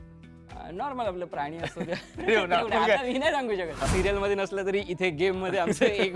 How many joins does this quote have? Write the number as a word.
one